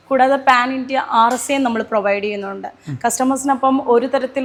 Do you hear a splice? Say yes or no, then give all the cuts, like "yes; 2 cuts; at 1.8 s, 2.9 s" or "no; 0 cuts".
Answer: no; 0 cuts